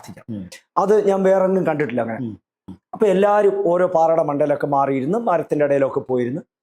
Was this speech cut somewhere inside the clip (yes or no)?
yes